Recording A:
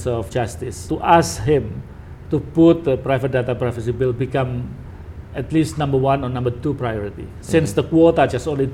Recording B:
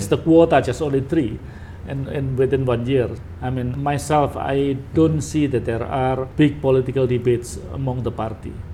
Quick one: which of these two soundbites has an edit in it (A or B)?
B